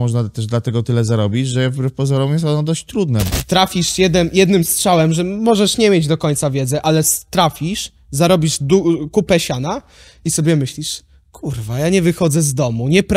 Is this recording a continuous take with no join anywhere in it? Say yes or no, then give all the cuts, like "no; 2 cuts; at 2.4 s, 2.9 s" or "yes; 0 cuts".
no; 1 cut; at 3.3 s